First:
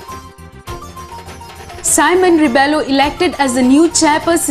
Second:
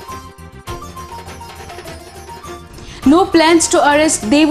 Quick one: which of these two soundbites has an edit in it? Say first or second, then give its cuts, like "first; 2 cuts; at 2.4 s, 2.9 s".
second; 2 cuts; at 1.7 s, 2.6 s